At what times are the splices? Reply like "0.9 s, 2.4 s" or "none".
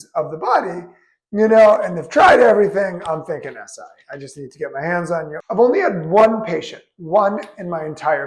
5.3 s